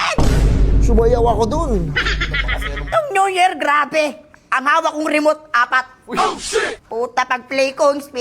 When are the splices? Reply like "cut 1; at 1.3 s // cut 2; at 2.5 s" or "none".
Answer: cut 1; at 2.8 s